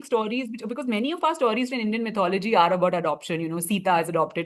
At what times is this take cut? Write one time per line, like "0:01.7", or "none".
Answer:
none